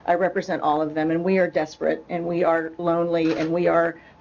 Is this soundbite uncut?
yes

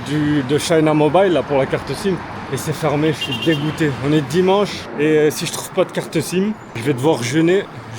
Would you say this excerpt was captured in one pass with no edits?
no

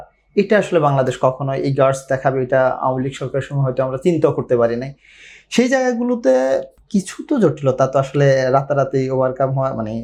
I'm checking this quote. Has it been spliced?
no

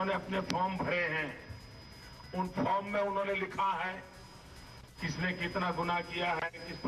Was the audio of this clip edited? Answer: no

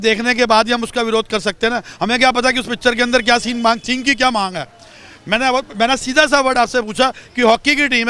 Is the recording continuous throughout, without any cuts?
yes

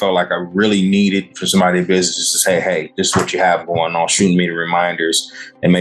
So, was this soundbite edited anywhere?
no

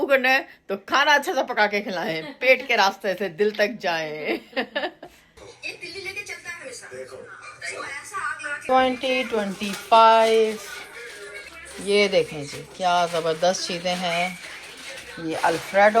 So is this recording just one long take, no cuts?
yes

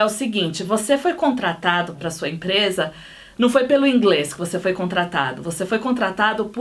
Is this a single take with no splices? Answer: no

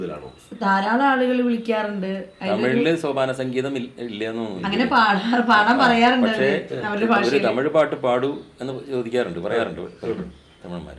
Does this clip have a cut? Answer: no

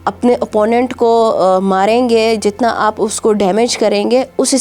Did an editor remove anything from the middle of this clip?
no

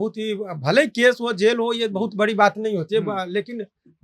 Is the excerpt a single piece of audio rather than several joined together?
yes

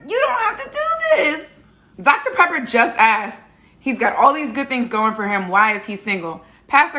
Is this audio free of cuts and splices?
yes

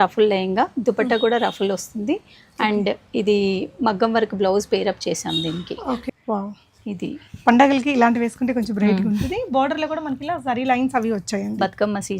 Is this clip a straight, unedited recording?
no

